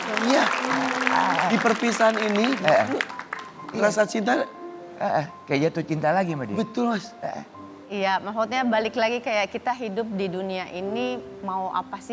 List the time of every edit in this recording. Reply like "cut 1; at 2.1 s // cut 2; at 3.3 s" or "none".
cut 1; at 7.8 s